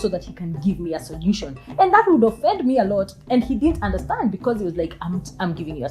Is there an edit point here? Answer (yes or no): no